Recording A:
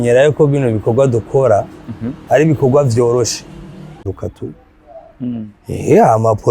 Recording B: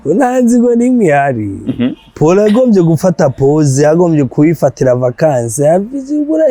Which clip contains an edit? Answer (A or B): A